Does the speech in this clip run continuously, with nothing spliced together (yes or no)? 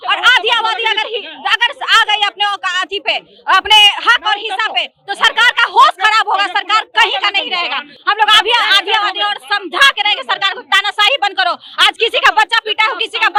yes